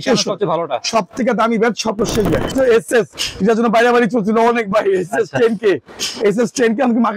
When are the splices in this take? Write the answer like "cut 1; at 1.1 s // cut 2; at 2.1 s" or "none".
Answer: cut 1; at 2.5 s